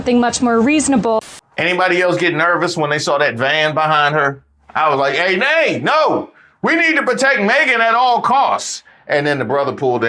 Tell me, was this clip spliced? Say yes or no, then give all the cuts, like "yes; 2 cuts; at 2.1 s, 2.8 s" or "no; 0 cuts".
yes; 1 cut; at 1.3 s